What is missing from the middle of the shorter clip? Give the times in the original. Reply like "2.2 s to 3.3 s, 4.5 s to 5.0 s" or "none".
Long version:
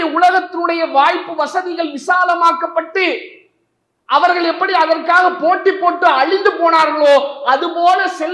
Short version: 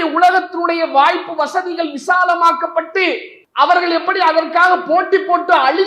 3.4 s to 3.9 s